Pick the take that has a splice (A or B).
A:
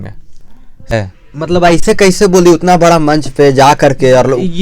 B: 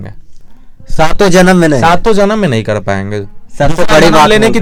A